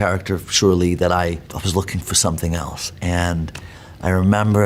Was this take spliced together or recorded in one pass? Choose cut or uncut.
uncut